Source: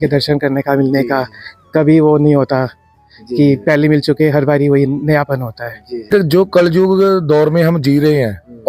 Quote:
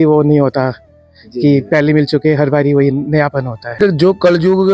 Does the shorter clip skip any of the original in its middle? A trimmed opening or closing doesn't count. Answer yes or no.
yes